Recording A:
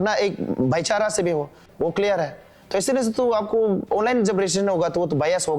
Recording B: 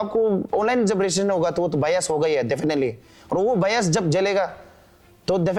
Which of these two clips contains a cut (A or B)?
A